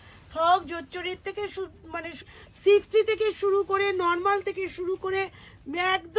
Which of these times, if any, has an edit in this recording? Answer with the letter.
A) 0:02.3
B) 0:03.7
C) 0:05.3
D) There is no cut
A